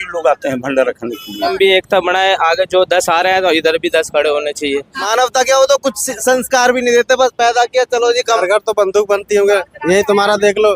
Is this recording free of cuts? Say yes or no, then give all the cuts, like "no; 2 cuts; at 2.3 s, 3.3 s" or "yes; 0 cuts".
no; 3 cuts; at 1.5 s, 5.0 s, 8.4 s